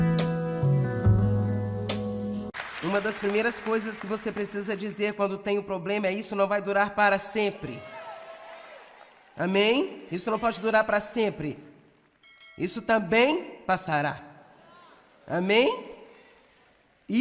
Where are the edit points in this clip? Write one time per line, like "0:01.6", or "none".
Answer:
0:02.6

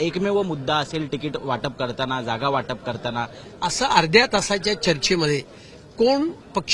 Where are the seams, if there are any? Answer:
0:03.4

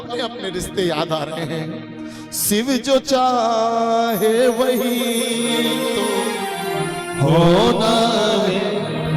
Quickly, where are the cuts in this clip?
none

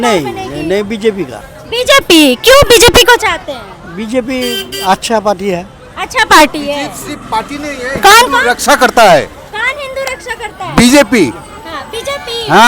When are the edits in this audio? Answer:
none

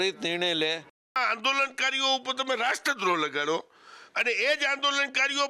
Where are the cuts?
0:01.2

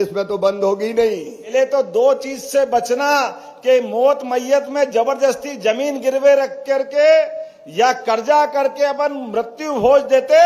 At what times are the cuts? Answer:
0:01.3

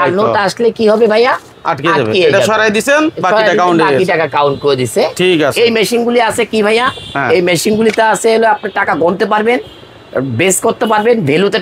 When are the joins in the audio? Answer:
none

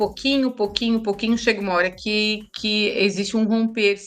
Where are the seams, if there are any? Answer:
none

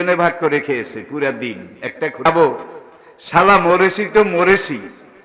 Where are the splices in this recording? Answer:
0:02.2

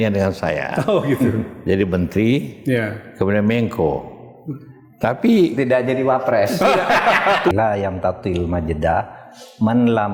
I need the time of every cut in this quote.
0:07.5

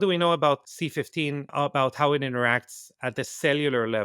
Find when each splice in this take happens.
0:01.2

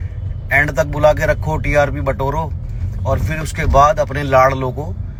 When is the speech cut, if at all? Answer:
none

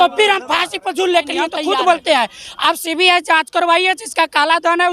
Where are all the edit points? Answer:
0:01.6

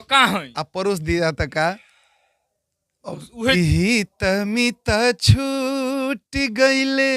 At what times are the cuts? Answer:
0:03.5

